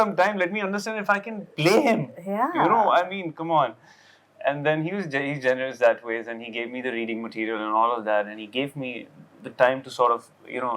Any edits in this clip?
no; 0 cuts

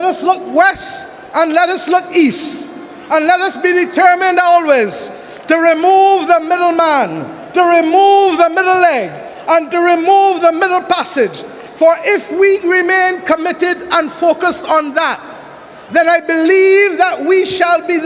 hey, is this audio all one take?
yes; 0 cuts

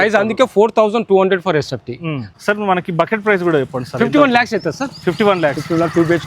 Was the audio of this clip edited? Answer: yes; 1 cut; at 2.2 s

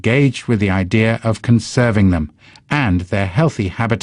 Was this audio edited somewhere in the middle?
no; 0 cuts

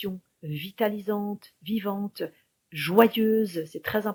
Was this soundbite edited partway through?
no; 0 cuts

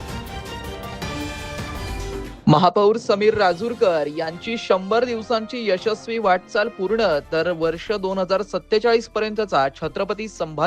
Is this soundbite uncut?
no; 1 cut; at 2.2 s

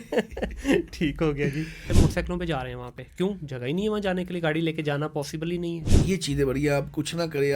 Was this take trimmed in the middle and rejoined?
yes; 2 cuts; at 1.9 s, 5.9 s

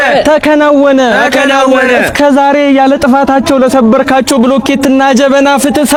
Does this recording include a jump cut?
no; 0 cuts

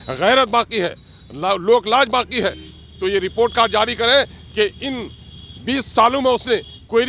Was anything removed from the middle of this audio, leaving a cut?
no; 0 cuts

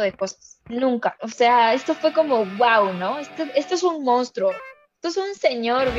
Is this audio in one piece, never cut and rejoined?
no; 1 cut; at 1.2 s

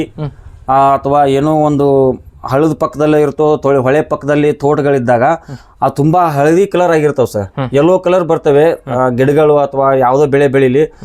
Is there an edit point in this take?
no; 0 cuts

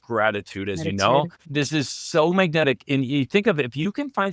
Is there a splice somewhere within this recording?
yes; 1 cut; at 1.4 s

